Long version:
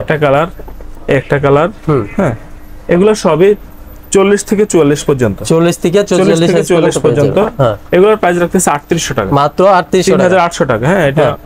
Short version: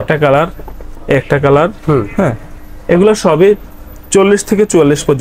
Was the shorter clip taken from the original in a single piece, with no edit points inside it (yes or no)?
yes